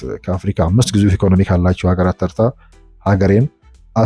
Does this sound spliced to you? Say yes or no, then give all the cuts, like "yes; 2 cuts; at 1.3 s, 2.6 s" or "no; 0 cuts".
no; 0 cuts